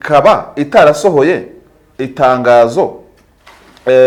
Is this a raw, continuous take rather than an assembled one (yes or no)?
yes